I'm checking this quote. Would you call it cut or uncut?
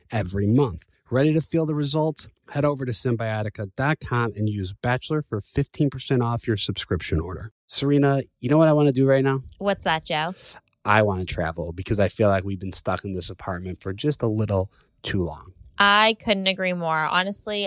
cut